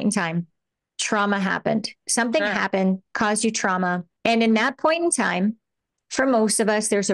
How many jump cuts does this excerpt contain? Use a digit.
1